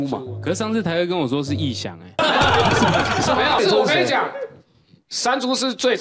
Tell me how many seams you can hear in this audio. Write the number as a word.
two